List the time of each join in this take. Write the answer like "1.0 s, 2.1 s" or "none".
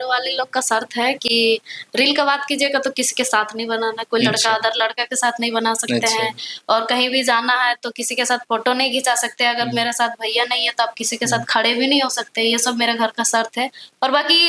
none

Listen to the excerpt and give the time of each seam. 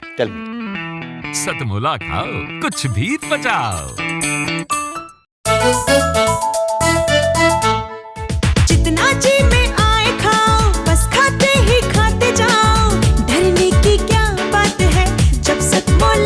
5.3 s

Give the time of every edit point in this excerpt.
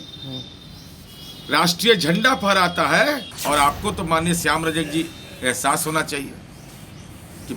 3.3 s

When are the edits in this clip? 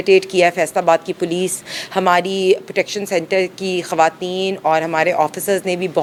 none

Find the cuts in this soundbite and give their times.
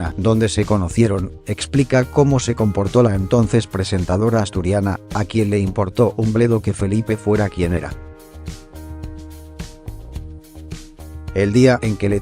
2.0 s

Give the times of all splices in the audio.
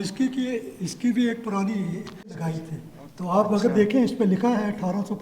2.3 s

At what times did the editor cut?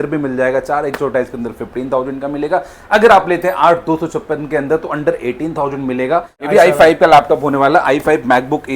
6.5 s

